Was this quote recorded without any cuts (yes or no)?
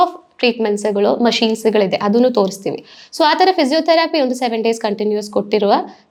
yes